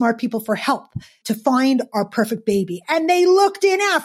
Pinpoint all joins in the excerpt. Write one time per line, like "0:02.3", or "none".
0:01.2